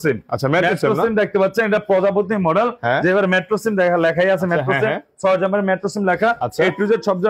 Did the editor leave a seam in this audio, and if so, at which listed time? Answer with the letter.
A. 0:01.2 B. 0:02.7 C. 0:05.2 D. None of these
D